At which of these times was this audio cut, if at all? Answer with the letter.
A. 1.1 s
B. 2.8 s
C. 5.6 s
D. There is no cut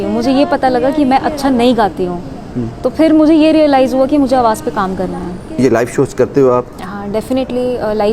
C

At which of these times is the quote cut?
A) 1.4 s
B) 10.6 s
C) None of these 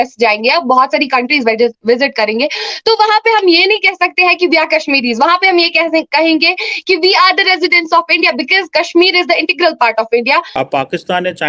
B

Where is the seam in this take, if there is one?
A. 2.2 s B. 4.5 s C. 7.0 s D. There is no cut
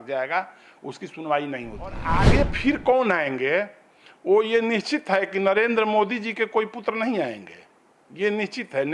A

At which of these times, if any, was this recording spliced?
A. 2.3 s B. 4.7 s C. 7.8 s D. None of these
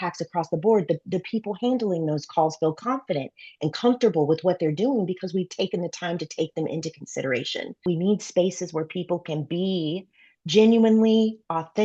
C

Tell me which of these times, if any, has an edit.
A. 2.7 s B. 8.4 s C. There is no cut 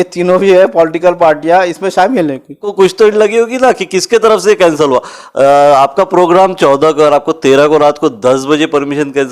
A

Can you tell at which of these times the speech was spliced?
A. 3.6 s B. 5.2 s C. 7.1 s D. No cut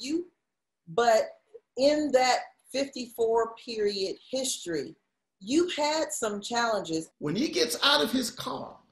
C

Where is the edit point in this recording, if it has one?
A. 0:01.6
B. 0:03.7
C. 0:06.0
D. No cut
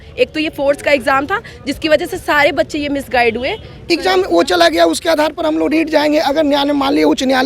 B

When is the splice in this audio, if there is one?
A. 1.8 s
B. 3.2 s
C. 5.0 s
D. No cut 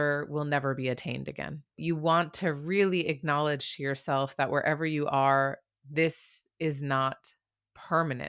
A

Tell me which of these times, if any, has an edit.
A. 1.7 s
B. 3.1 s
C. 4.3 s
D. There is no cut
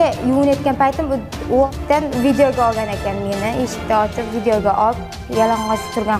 A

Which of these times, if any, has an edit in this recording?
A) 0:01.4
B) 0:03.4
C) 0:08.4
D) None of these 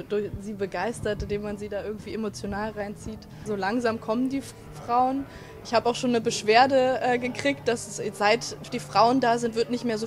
B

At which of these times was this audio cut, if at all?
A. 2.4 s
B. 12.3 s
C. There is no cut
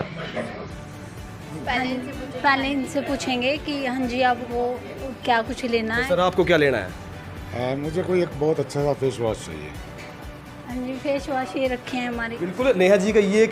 B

